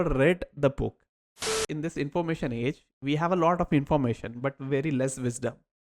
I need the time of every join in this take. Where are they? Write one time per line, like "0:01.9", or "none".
0:01.6

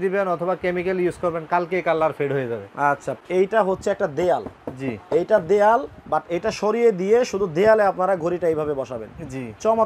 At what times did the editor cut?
0:03.1

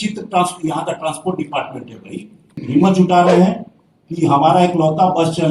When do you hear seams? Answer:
0:02.6

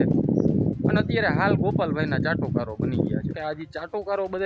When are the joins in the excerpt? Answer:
0:03.4

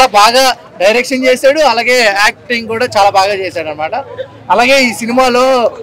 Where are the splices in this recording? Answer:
none

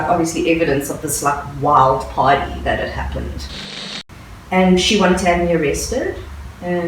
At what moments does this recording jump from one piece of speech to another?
0:03.8

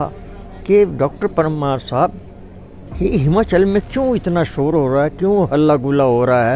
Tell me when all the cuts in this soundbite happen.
none

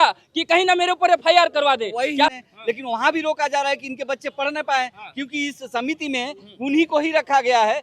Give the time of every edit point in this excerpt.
0:02.3

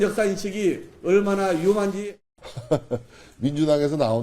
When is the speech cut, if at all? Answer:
0:02.1

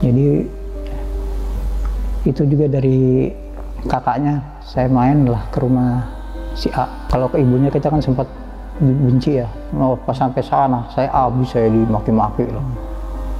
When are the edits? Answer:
0:07.0

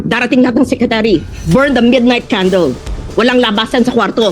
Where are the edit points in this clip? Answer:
0:01.3

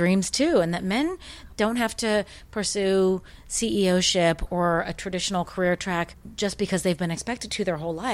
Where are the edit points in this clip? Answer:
0:01.4
0:04.5
0:06.2

